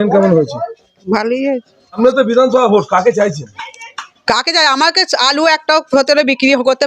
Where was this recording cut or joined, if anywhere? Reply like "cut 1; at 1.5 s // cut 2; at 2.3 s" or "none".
cut 1; at 2.0 s